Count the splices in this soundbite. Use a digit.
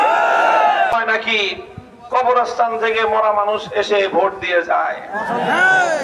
1